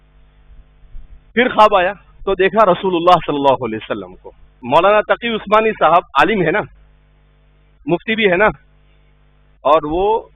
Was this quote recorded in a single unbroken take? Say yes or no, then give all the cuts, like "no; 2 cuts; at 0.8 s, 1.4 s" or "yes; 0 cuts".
no; 1 cut; at 4.5 s